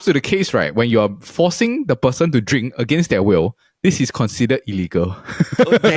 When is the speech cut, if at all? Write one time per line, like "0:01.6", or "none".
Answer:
none